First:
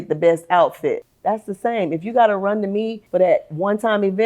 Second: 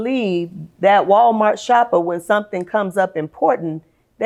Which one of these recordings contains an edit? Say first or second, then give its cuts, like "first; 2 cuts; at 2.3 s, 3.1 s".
first; 2 cuts; at 1.1 s, 3.0 s